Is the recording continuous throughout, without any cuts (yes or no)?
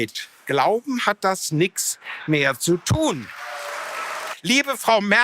no